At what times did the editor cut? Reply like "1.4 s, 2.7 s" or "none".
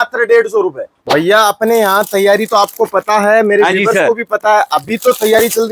0.9 s